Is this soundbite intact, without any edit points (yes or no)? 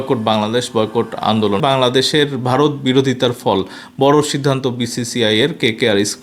no